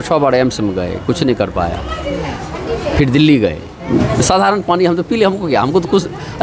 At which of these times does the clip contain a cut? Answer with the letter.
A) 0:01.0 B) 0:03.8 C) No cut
B